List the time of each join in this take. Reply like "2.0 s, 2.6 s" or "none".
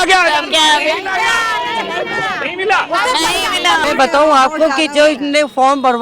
3.8 s